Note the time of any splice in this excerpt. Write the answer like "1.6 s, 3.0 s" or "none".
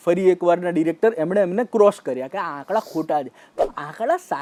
none